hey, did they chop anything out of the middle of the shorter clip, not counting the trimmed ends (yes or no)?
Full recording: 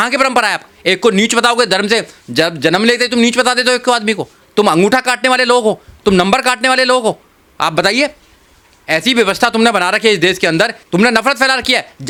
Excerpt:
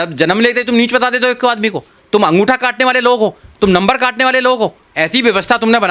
yes